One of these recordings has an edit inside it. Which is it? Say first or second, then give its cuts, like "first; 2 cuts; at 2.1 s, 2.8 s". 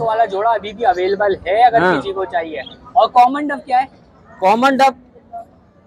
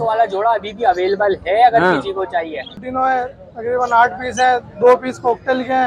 second; 1 cut; at 2.8 s